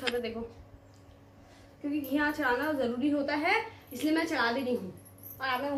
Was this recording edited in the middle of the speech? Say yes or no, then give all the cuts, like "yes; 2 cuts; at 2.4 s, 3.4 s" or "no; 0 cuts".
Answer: no; 0 cuts